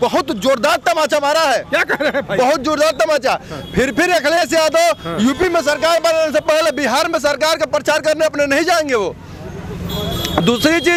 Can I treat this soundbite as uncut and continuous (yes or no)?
yes